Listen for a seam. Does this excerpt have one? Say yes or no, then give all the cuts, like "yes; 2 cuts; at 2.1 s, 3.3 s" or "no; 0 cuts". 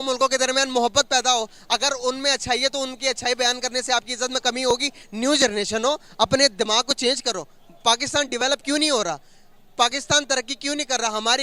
yes; 1 cut; at 5.0 s